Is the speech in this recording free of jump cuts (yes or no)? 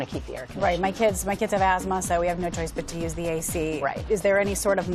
yes